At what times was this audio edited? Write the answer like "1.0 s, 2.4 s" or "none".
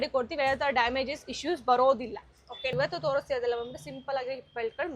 2.7 s